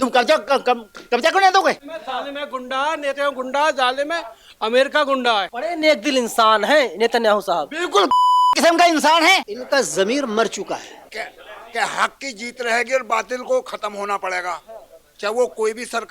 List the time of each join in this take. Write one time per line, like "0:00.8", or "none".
0:01.9
0:05.5
0:09.5
0:11.1